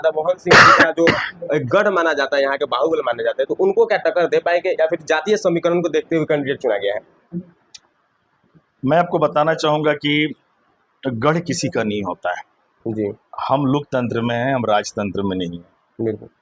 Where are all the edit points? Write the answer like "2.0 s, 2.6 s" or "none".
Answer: none